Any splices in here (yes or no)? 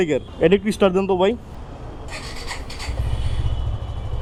no